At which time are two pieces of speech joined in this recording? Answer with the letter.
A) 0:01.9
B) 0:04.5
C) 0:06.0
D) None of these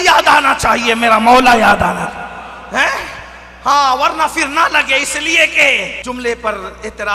C